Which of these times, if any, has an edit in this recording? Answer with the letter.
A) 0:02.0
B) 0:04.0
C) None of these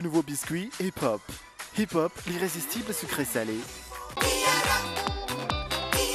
B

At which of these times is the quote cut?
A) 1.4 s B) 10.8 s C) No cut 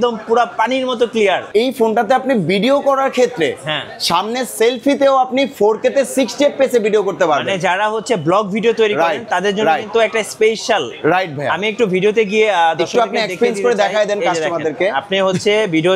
A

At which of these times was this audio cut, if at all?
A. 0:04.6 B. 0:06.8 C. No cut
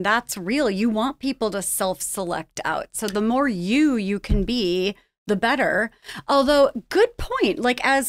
C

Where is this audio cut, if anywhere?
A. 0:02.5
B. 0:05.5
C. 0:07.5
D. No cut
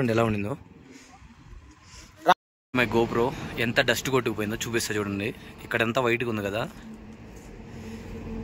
A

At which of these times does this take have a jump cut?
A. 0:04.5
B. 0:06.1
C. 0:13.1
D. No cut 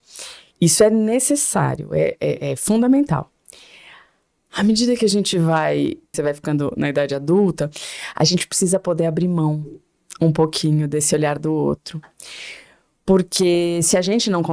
B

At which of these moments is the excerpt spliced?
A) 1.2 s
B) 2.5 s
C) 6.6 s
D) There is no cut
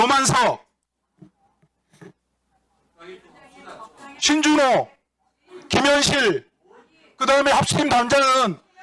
D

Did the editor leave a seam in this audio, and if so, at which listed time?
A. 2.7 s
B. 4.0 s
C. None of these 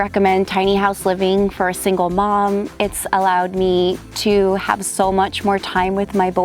A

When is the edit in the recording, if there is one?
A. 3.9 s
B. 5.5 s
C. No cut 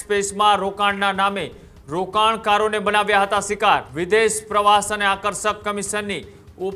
A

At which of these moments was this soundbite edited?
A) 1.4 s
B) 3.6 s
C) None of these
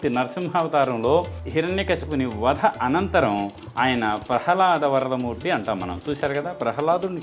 A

